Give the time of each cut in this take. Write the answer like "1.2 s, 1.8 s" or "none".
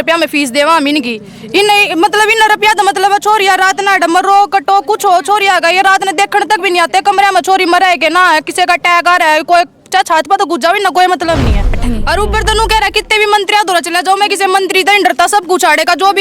11.8 s